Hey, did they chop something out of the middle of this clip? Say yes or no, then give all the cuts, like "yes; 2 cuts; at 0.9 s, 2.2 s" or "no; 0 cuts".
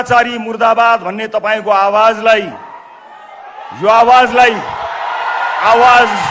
no; 0 cuts